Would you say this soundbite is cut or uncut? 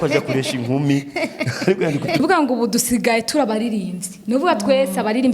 cut